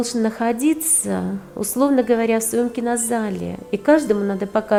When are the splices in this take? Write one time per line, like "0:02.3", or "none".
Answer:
none